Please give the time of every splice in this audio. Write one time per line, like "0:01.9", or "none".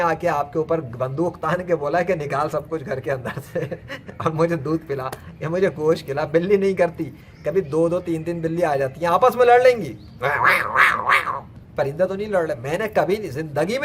0:11.6